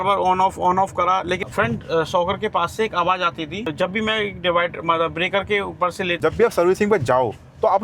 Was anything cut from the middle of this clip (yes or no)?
yes